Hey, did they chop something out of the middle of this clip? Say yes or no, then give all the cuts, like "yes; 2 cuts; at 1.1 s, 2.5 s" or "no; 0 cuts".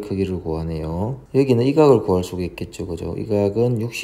yes; 1 cut; at 1.2 s